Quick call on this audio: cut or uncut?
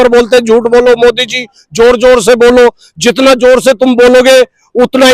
uncut